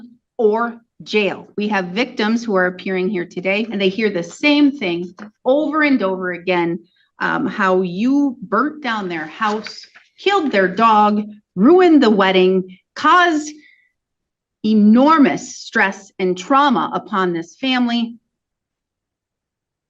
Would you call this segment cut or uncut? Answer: cut